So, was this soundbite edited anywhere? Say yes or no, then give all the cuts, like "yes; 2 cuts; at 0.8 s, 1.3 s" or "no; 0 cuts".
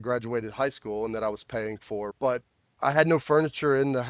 yes; 1 cut; at 2.1 s